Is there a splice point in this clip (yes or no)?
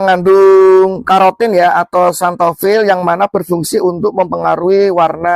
no